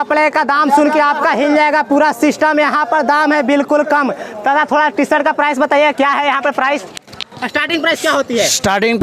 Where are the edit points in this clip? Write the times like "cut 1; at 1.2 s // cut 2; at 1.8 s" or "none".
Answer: none